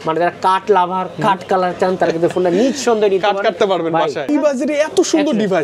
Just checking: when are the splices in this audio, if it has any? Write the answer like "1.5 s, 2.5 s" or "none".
4.3 s